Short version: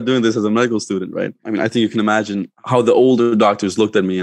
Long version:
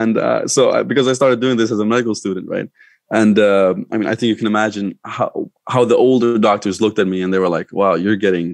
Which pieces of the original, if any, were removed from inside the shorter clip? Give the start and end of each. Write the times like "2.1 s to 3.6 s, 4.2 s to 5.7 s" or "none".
2.8 s to 3.9 s, 5.0 s to 5.6 s